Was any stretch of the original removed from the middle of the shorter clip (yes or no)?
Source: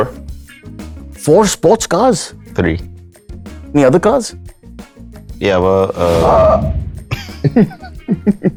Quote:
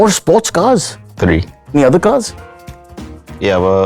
yes